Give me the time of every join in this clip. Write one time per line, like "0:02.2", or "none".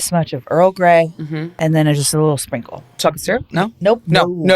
0:01.5
0:03.0